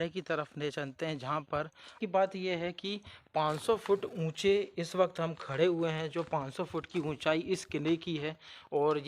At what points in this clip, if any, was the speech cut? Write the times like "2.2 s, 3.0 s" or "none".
2.0 s